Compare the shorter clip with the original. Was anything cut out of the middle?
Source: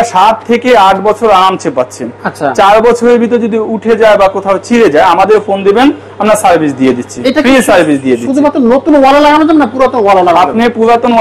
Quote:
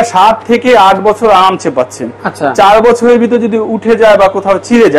no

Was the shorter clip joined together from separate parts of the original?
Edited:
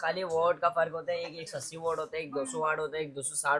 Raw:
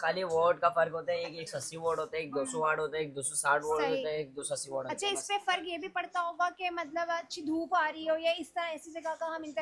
no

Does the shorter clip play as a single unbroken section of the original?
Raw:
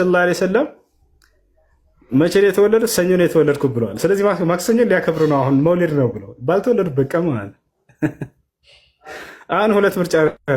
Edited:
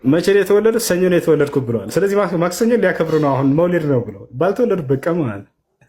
yes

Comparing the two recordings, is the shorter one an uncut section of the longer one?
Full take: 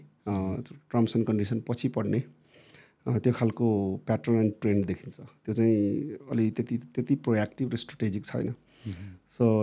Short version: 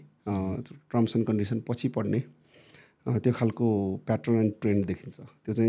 yes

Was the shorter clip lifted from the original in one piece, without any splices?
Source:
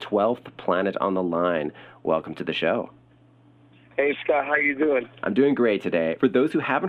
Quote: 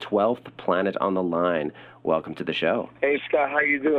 no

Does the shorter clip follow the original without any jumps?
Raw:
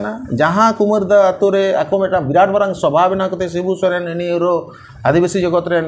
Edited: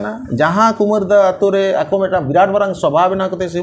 yes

